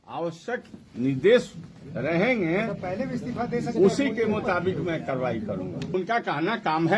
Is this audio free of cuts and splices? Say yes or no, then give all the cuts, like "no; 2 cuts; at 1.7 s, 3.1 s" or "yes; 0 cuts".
no; 1 cut; at 5.9 s